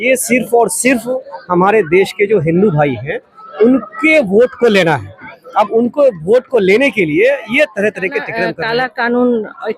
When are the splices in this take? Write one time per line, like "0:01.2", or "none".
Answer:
0:08.4